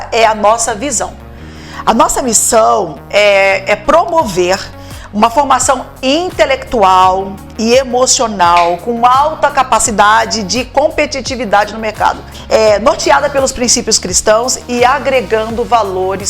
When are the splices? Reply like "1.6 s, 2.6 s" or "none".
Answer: 12.3 s